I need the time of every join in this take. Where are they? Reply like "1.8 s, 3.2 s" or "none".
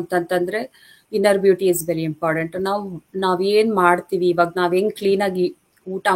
none